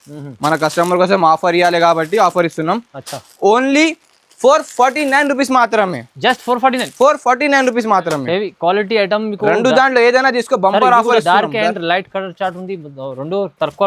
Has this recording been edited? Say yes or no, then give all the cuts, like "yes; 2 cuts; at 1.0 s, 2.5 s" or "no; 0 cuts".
no; 0 cuts